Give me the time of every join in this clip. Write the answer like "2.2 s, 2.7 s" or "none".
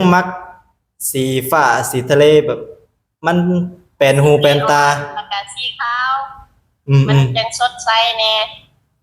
none